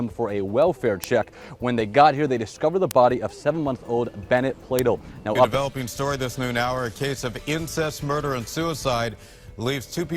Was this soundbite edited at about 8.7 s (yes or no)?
no